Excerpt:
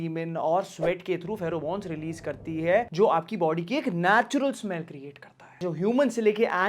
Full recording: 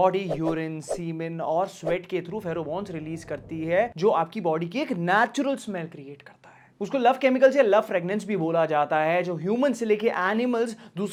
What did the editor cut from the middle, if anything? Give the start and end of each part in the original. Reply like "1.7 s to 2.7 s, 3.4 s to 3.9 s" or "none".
6.7 s to 9.3 s